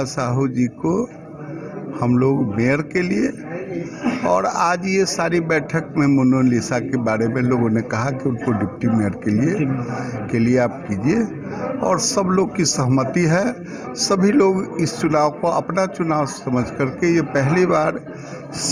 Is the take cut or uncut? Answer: uncut